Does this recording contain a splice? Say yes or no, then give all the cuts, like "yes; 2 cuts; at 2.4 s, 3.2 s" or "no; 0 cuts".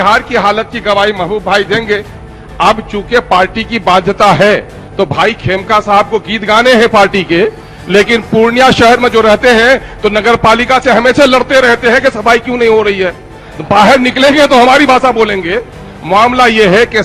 no; 0 cuts